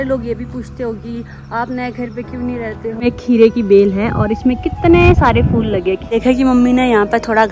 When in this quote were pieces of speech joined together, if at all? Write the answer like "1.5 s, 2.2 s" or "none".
3.0 s, 6.2 s